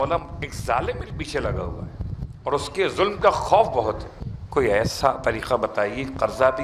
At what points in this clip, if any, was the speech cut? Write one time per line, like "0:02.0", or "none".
none